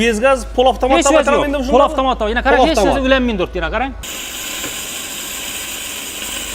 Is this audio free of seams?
no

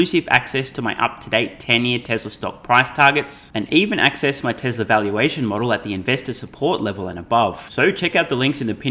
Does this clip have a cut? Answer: no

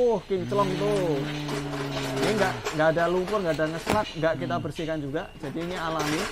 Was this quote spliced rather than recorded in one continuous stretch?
no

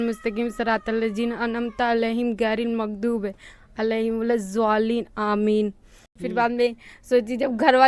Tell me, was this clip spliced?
yes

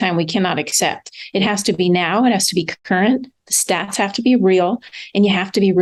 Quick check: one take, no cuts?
yes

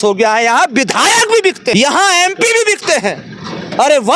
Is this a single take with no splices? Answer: no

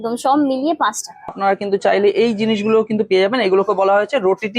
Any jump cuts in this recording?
yes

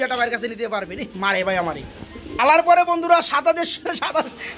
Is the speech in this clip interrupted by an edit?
no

